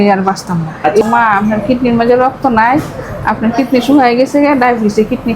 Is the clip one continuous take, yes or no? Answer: no